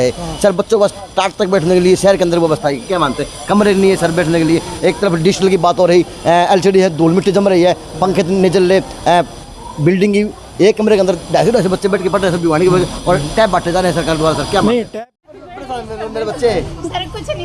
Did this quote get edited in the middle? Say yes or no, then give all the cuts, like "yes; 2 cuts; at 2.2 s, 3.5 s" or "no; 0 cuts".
yes; 1 cut; at 14.9 s